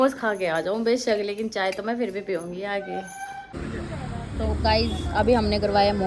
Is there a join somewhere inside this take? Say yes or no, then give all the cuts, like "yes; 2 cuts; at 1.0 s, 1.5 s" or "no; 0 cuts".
yes; 1 cut; at 3.5 s